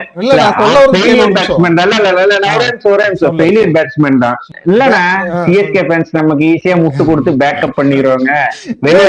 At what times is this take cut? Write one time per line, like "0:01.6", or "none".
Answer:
0:04.5